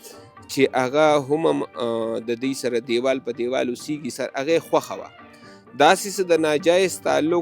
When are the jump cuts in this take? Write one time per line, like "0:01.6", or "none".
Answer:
0:04.1